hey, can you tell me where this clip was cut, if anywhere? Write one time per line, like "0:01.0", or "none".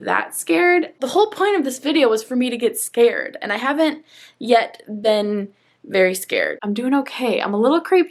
0:01.0
0:06.6